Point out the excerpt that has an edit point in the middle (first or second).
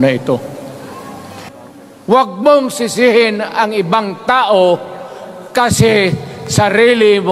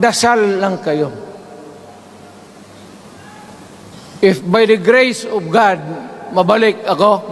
first